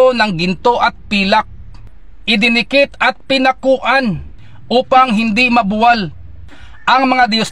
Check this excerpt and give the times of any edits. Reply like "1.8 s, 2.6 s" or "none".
1.7 s